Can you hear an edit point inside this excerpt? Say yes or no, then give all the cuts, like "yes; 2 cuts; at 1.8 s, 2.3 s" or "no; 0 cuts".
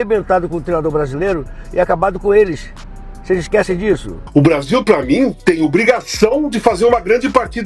yes; 1 cut; at 4.2 s